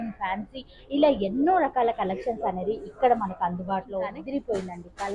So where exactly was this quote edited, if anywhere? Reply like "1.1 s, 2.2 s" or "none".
4.1 s